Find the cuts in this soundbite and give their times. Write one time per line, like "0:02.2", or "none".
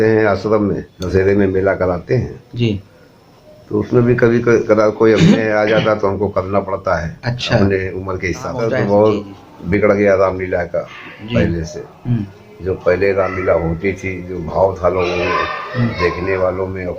0:01.0
0:08.6